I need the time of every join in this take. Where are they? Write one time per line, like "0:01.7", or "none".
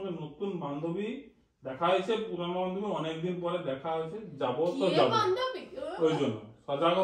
none